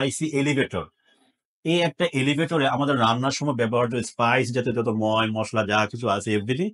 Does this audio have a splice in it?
no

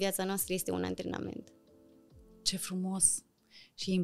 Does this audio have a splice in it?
no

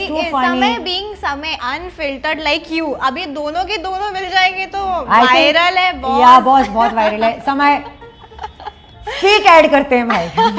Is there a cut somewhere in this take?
no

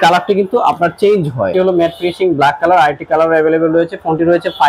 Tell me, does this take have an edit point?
yes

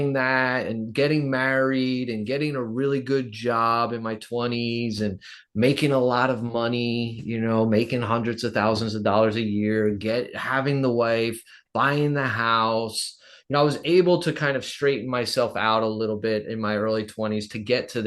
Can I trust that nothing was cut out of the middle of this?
yes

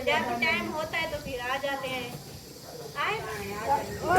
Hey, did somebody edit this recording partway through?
yes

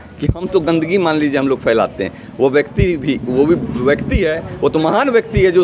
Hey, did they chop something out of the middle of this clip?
no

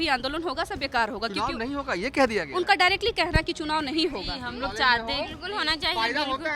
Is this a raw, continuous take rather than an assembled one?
no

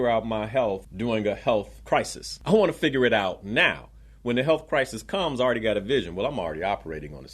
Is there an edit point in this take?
yes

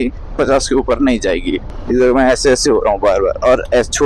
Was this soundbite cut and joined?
yes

